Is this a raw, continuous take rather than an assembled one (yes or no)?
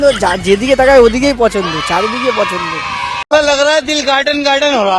yes